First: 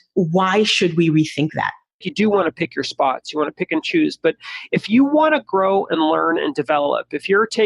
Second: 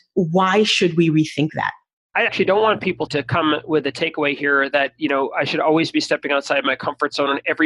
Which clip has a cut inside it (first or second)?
first